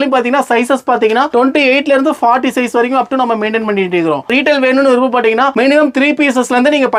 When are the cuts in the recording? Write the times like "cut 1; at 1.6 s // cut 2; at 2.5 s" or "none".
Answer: none